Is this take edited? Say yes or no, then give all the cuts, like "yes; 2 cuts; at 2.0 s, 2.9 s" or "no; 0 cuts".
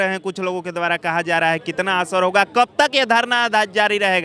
no; 0 cuts